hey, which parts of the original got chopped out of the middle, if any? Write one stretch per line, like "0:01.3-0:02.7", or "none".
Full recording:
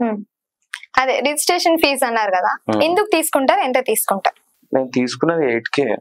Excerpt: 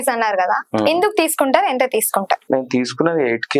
0:04.4-0:04.7

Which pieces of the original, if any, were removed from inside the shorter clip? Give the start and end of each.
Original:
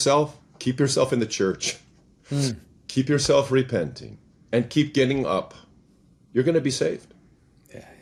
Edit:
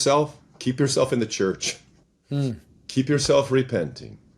none

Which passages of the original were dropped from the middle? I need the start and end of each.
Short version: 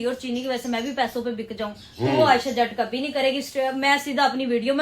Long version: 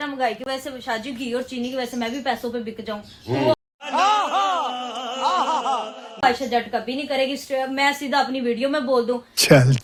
0:03.5-0:06.2

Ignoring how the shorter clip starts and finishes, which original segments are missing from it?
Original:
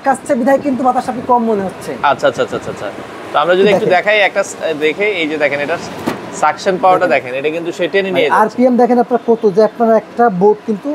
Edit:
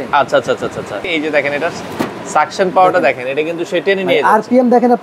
0:03.0-0:05.2

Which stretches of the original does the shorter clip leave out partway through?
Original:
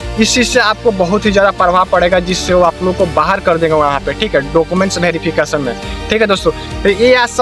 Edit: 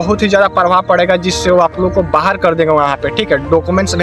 none

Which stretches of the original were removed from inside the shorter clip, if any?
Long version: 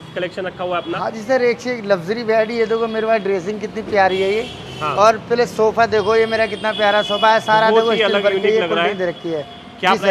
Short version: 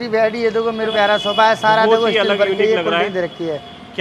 0:03.1-0:06.8

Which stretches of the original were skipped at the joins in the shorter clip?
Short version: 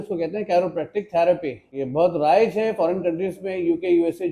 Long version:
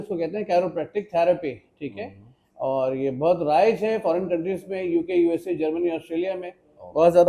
0:01.8-0:03.0

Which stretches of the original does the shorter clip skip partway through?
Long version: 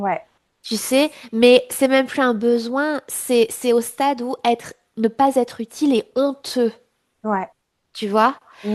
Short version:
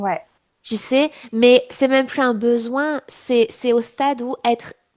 none

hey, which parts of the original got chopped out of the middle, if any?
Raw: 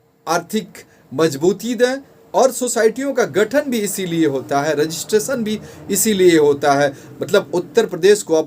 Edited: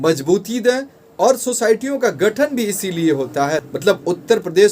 0:04.7-0:07.1

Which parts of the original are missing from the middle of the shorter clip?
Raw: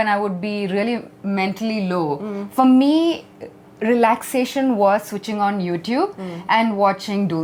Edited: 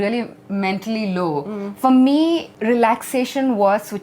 0:03.3-0:03.7

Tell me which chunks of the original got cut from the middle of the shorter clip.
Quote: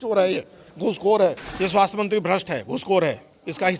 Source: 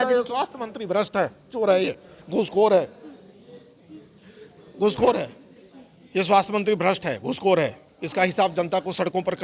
0:03.0-0:06.0

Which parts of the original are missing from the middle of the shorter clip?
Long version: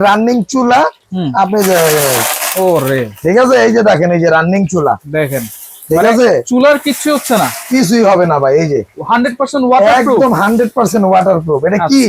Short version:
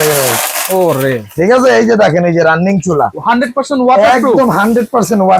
0:05.0-0:09.0

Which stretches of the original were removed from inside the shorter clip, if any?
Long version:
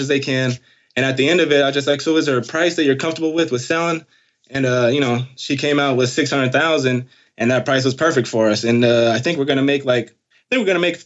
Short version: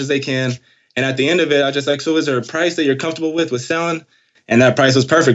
0:04.3-0:07.2

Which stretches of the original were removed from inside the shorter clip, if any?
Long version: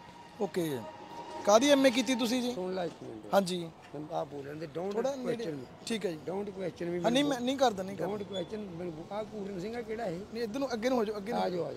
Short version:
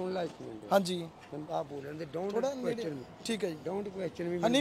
none

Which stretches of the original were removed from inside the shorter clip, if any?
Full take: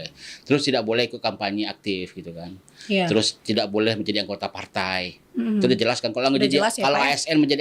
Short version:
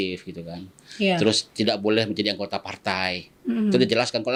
none

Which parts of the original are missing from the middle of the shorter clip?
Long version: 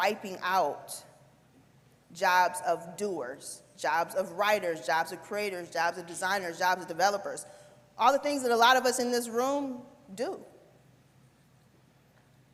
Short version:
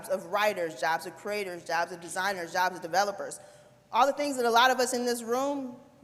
none

